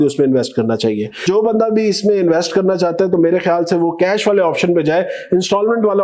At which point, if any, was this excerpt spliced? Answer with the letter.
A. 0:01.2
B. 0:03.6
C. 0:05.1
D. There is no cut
A